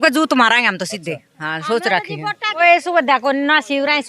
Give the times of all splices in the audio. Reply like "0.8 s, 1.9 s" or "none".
2.6 s

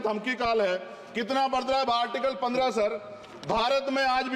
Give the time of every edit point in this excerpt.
none

